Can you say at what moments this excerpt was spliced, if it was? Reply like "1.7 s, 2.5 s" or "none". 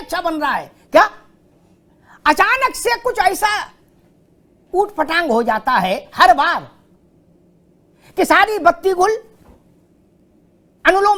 none

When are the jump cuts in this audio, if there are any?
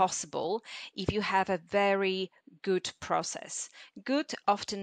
none

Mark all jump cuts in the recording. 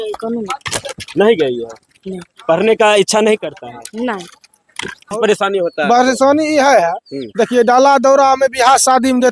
5.1 s

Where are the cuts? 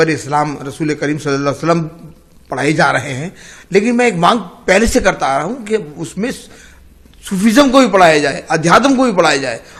none

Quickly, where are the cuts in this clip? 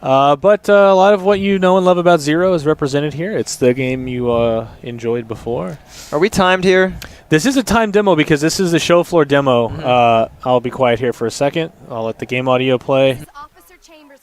9.1 s

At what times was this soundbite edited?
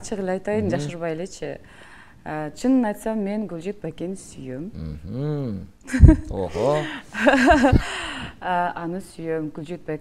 none

